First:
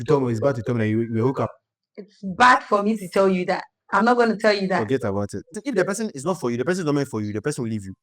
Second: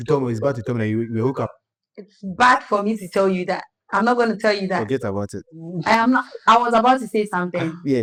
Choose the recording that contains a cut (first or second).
first